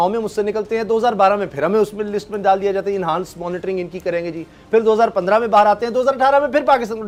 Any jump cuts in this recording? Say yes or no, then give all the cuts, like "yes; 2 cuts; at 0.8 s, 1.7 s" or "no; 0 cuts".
no; 0 cuts